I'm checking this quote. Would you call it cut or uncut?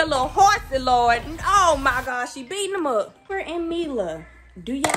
cut